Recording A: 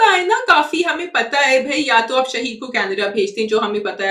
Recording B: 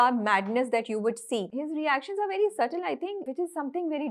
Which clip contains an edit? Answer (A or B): B